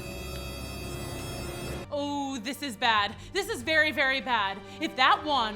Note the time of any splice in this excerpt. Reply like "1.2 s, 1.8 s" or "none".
1.9 s